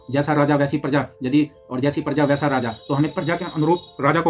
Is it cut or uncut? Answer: uncut